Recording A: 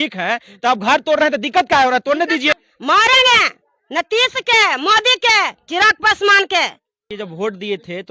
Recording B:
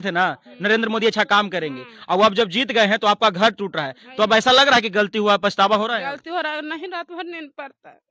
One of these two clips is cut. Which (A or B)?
A